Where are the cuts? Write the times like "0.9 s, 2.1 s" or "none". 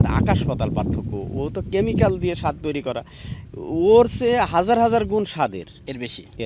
none